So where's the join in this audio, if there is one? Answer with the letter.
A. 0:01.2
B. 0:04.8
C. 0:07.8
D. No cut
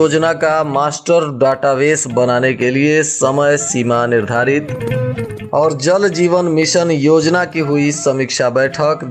D